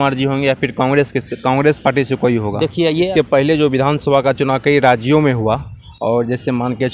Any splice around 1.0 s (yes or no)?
no